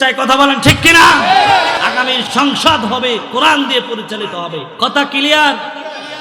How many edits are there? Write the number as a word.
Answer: two